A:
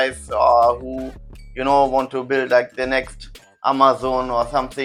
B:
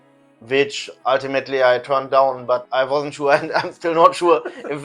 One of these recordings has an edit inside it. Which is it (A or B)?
B